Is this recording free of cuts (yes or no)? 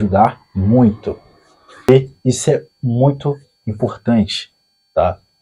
no